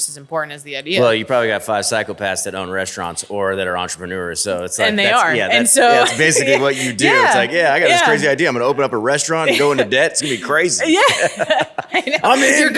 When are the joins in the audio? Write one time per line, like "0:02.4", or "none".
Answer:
none